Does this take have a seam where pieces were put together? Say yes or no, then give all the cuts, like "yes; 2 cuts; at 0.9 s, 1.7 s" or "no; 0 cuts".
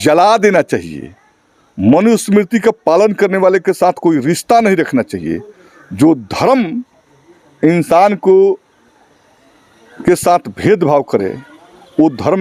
no; 0 cuts